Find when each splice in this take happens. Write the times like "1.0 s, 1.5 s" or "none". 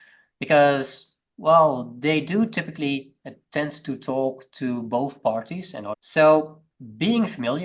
6.0 s, 6.6 s